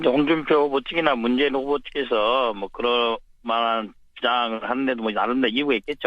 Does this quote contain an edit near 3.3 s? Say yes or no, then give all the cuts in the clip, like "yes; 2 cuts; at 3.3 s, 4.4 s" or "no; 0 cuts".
no; 1 cut; at 4.7 s